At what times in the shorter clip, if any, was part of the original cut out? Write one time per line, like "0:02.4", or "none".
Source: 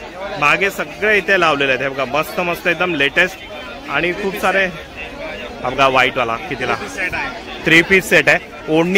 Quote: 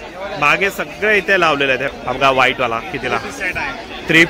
0:01.9